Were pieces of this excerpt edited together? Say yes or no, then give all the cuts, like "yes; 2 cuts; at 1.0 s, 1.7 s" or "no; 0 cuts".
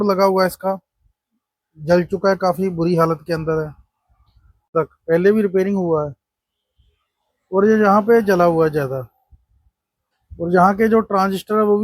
yes; 1 cut; at 4.7 s